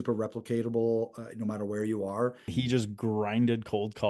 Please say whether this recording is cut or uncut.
cut